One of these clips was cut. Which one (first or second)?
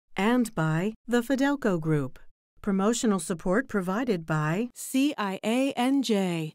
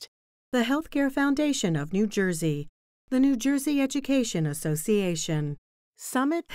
first